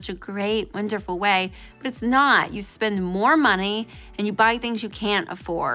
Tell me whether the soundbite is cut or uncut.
uncut